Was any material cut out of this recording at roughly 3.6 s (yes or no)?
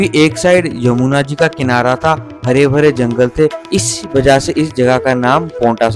yes